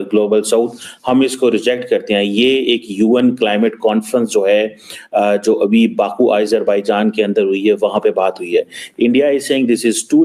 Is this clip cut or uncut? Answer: uncut